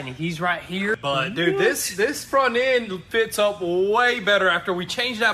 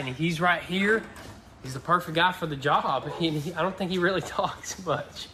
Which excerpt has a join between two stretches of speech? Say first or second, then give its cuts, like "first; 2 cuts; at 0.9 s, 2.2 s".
first; 1 cut; at 1.0 s